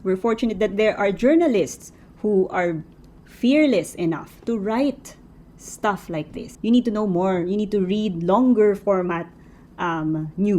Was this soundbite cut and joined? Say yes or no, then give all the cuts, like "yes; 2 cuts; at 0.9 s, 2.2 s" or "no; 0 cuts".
yes; 1 cut; at 6.4 s